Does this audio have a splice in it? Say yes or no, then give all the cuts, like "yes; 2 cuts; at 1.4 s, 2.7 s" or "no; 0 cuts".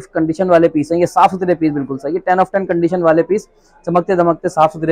no; 0 cuts